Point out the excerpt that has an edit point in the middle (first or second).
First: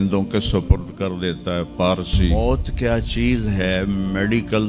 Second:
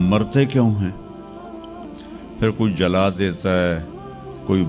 first